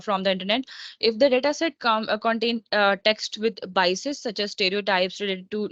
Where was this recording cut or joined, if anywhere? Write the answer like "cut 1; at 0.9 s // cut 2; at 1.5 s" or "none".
none